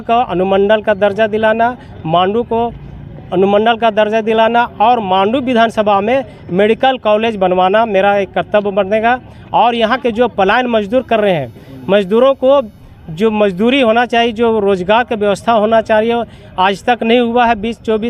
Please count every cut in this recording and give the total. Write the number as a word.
zero